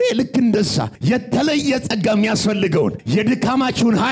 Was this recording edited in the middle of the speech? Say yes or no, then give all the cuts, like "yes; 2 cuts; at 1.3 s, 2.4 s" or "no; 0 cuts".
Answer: yes; 2 cuts; at 0.9 s, 3.0 s